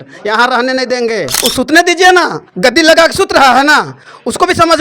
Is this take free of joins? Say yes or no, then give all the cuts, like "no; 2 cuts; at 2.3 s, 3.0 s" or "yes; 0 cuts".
no; 1 cut; at 1.3 s